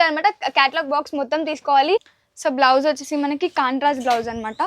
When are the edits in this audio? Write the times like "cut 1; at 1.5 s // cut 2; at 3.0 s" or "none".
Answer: cut 1; at 2.1 s